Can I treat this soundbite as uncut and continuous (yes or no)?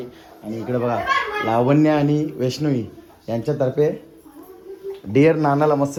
yes